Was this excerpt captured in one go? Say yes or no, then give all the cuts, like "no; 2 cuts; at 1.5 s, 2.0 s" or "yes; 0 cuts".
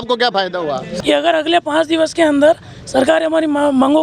no; 1 cut; at 0.9 s